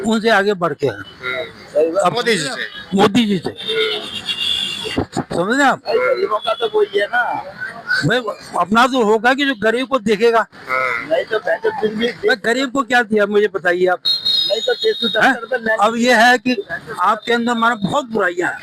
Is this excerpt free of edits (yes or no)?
yes